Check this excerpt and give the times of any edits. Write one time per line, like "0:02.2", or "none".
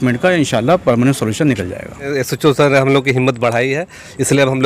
0:02.1